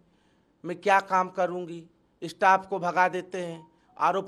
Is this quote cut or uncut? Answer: uncut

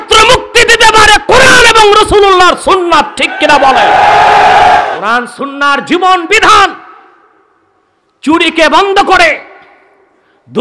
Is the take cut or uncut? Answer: cut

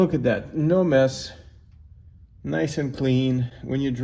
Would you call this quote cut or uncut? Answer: uncut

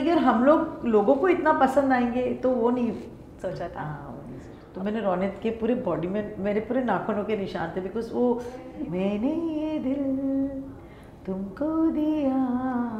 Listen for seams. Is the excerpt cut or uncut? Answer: cut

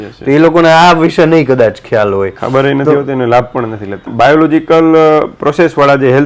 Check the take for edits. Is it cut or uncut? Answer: cut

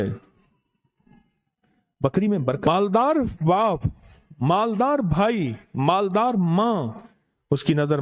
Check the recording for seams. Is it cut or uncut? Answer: cut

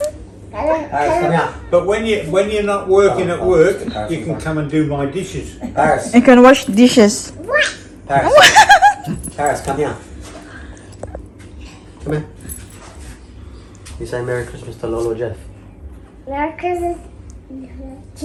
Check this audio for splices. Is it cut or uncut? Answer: uncut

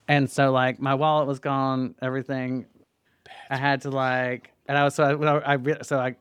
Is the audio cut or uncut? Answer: uncut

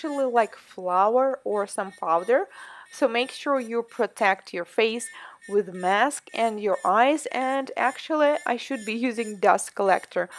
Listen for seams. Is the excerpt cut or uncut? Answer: uncut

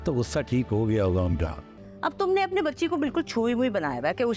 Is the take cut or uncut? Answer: cut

